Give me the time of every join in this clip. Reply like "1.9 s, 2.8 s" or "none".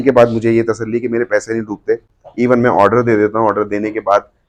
none